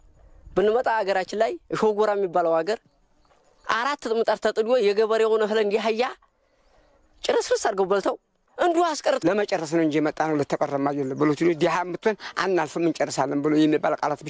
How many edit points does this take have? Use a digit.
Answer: 1